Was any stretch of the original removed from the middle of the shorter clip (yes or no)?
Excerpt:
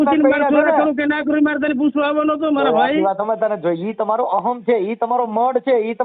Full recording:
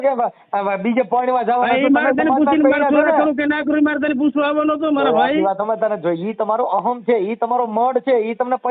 no